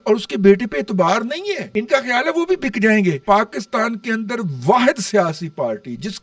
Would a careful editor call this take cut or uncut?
cut